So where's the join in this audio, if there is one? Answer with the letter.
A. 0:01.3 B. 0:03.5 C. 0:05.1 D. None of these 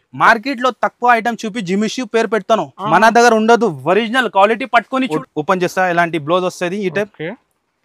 C